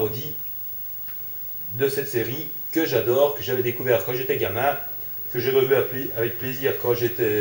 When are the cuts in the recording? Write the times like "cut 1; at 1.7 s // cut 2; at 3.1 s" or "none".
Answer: cut 1; at 4.5 s